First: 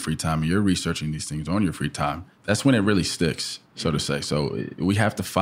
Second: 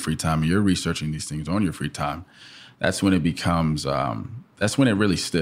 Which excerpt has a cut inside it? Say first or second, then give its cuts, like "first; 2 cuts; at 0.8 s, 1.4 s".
first; 1 cut; at 2.3 s